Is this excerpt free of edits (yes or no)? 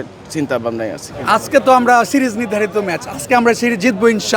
no